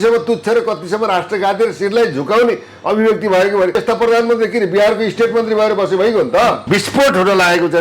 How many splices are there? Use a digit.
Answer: 2